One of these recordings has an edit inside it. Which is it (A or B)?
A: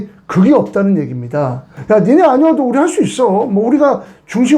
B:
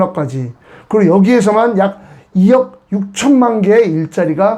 A